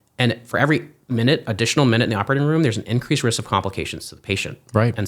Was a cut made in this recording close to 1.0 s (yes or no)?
yes